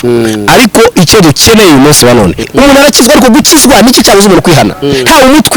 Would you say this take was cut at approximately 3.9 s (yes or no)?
no